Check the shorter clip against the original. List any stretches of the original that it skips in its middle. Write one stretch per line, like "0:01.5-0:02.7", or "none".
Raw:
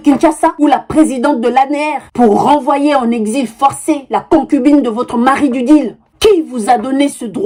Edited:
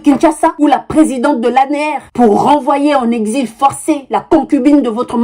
none